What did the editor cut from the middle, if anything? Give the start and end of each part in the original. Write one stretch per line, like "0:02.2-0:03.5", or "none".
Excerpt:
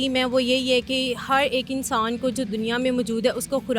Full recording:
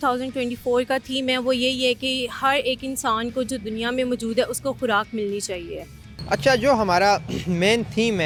none